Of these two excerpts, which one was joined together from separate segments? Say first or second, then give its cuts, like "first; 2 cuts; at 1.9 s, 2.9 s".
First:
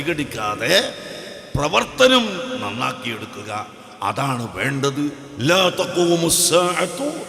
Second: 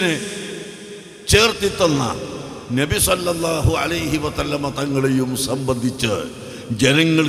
first; 1 cut; at 5.3 s